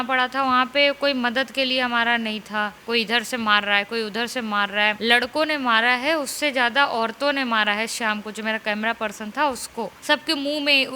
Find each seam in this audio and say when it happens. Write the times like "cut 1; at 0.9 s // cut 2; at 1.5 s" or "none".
cut 1; at 2.8 s // cut 2; at 5.0 s // cut 3; at 9.9 s